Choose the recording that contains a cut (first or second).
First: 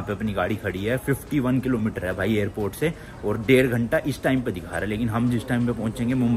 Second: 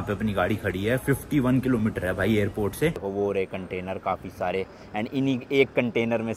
second